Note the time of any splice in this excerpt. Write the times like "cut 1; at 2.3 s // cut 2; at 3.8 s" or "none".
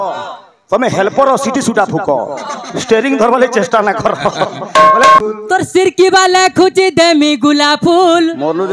cut 1; at 5.2 s